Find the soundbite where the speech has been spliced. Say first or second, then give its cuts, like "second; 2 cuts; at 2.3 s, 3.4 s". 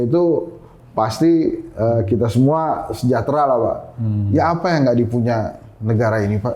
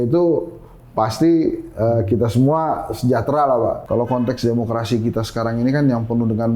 second; 1 cut; at 3.8 s